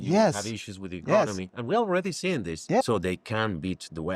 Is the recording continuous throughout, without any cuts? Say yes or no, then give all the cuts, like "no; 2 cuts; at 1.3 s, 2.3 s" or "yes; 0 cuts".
no; 1 cut; at 2.8 s